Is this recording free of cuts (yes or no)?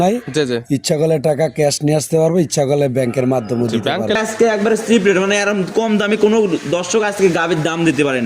no